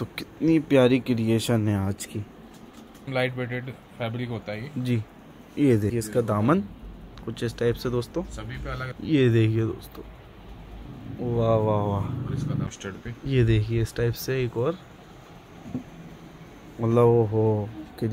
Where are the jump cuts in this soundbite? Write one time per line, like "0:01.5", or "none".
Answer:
0:03.1
0:05.9
0:08.9
0:12.7